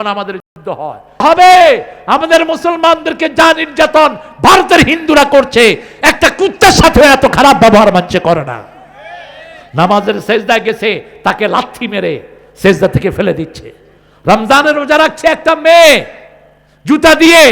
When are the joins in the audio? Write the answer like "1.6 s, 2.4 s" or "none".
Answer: 1.2 s

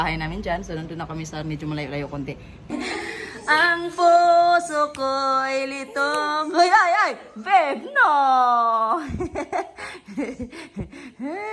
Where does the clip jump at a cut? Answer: 2.7 s

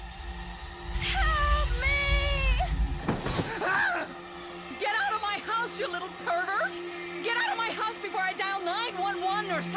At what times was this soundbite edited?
2.5 s

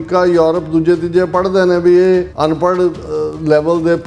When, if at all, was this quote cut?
2.3 s

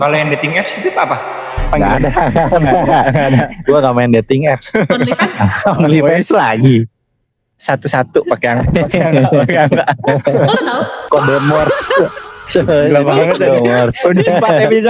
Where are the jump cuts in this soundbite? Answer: none

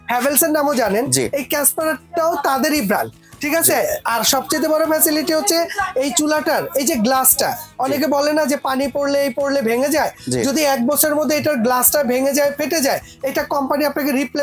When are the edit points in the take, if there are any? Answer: none

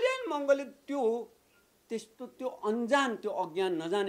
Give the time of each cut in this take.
none

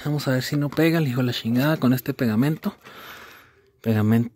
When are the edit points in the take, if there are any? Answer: none

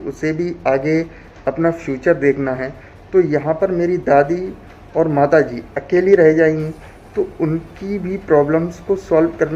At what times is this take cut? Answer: none

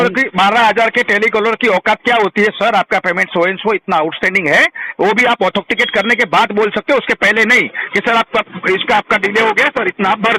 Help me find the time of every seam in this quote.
none

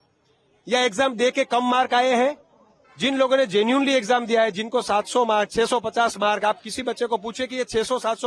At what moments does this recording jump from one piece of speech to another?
none

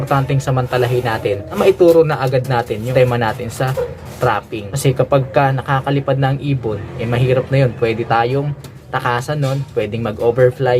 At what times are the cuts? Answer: 1.6 s, 2.9 s, 4.6 s

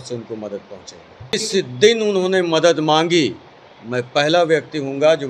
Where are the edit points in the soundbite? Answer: 1.3 s

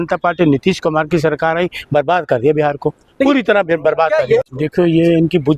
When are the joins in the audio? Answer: 4.5 s

